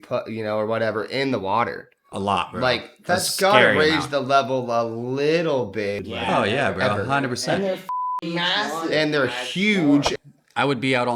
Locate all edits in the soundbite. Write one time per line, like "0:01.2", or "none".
0:06.0
0:10.1